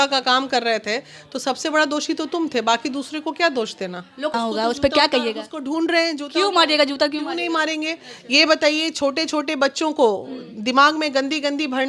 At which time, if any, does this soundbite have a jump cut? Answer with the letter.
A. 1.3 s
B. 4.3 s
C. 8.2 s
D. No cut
B